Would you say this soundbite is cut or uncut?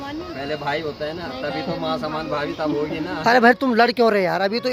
uncut